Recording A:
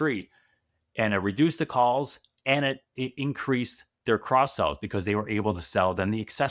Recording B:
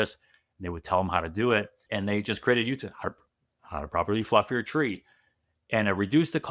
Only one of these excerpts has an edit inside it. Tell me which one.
B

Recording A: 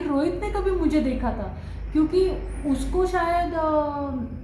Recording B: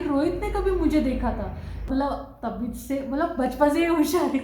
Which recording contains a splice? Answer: B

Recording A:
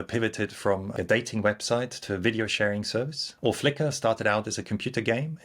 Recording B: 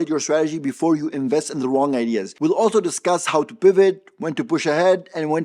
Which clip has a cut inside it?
A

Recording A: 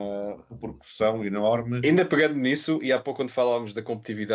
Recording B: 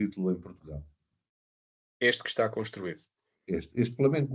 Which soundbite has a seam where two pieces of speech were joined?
A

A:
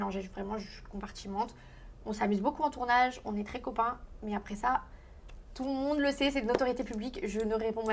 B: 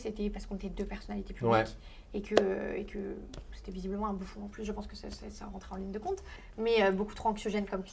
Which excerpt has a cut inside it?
B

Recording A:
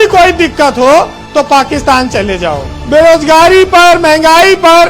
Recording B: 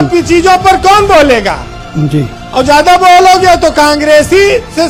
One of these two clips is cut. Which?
A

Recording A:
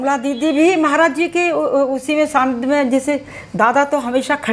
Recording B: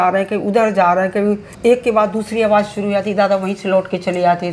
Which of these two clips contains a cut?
B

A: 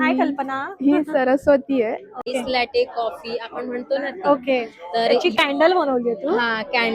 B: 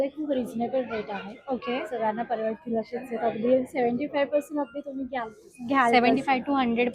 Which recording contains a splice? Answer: A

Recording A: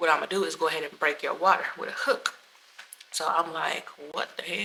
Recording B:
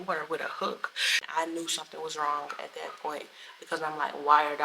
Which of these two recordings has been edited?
B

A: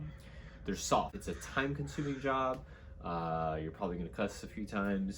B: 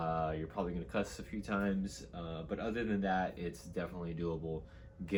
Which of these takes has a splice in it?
A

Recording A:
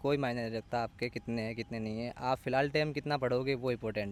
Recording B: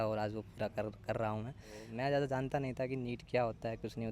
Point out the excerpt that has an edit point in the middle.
B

